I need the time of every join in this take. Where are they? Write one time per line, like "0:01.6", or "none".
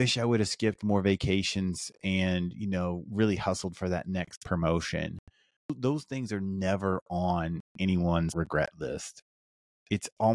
0:05.7
0:08.3